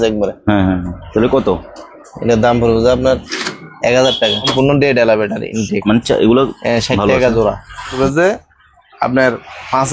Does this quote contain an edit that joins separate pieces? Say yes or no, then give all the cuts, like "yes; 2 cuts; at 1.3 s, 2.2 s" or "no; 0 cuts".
yes; 2 cuts; at 4.5 s, 8.0 s